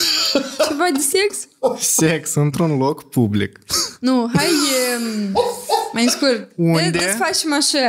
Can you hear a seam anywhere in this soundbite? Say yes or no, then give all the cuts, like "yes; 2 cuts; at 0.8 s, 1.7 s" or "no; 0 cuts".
no; 0 cuts